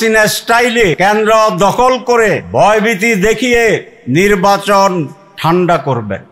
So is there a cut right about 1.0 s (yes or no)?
yes